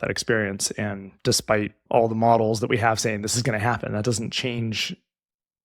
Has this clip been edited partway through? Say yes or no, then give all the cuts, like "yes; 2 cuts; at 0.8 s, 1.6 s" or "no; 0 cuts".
yes; 1 cut; at 1.8 s